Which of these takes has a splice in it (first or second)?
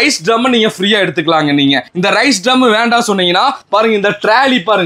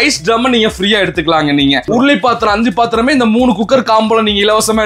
second